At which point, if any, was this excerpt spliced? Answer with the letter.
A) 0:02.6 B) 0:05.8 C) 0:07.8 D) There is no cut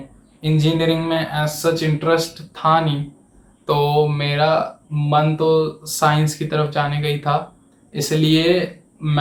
D